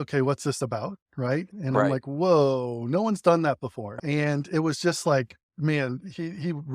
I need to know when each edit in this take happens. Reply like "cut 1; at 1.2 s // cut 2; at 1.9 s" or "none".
cut 1; at 1.5 s // cut 2; at 4.0 s